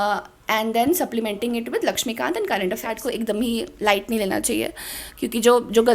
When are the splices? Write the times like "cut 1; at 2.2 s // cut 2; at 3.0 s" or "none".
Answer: cut 1; at 2.9 s